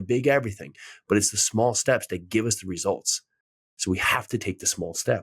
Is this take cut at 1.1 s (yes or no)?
no